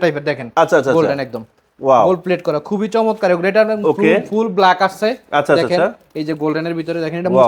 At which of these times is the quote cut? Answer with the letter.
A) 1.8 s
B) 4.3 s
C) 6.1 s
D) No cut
D